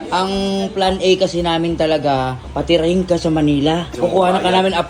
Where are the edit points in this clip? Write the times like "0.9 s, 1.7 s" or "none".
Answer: 2.4 s, 3.8 s